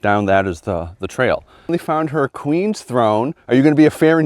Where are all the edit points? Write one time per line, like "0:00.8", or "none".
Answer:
0:01.7